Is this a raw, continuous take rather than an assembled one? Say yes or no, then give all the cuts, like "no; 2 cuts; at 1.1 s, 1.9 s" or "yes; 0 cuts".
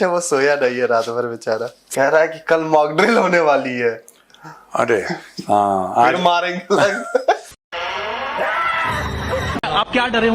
yes; 0 cuts